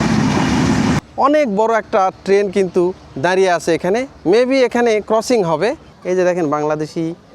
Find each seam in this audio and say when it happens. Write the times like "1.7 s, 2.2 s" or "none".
1.0 s, 4.1 s, 5.9 s